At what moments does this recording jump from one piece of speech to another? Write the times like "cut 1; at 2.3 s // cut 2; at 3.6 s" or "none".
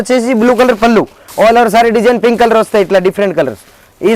cut 1; at 1.2 s